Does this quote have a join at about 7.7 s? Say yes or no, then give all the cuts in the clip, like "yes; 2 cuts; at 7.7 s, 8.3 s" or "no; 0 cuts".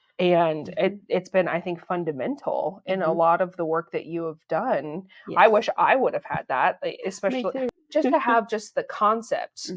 yes; 1 cut; at 7.7 s